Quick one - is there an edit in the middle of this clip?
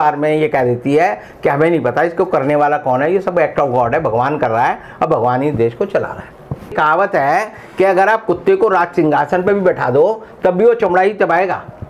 yes; 1 cut; at 6.7 s

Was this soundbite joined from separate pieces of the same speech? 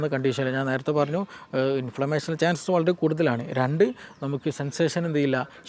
no; 0 cuts

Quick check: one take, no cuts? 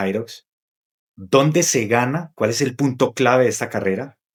yes; 0 cuts

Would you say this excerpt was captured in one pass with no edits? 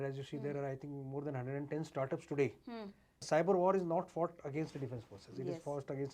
no; 1 cut; at 3.2 s

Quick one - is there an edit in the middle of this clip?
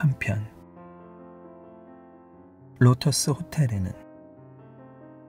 yes; 3 cuts; at 1.0 s, 2.8 s, 3.9 s

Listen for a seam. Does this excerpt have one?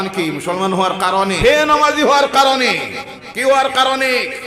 yes; 1 cut; at 1.4 s

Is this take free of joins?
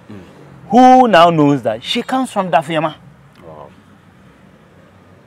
yes; 0 cuts

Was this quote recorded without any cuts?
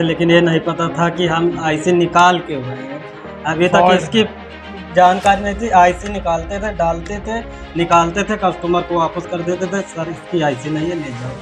yes; 0 cuts

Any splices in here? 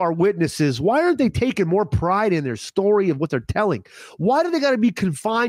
no; 0 cuts

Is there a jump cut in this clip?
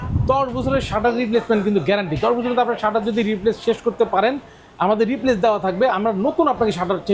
no; 0 cuts

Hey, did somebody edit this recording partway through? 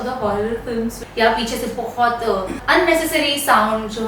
yes; 2 cuts; at 1.0 s, 2.6 s

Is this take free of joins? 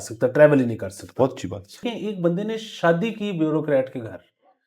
no; 1 cut; at 1.9 s

